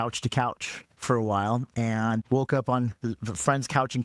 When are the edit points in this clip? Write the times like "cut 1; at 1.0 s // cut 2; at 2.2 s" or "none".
none